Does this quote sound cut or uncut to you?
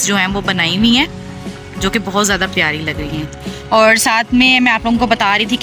uncut